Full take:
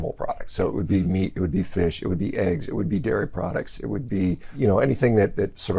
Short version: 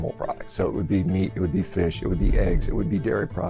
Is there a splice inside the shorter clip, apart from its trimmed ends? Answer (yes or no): no